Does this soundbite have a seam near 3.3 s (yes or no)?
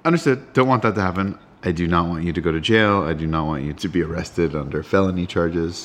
no